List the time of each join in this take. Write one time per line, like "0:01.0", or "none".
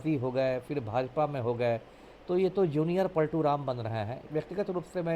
0:04.2